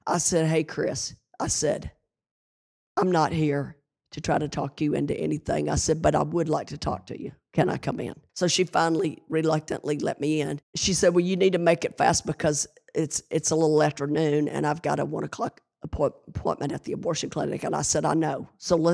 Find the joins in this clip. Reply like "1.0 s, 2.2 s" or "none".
8.2 s, 10.7 s